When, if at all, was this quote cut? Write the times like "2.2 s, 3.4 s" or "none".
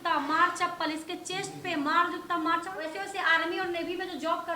2.9 s